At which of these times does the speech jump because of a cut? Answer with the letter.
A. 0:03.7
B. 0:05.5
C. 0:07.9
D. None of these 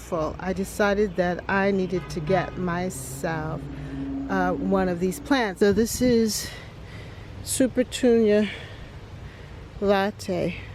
B